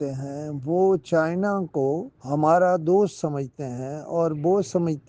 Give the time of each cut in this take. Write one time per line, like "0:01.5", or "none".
0:02.1